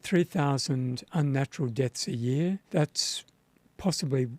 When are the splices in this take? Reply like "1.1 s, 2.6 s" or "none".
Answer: 2.6 s